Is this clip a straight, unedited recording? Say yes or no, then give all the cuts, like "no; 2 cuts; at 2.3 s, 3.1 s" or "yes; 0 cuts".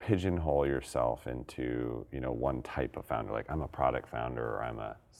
yes; 0 cuts